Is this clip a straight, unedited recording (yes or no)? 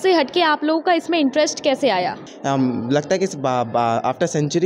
no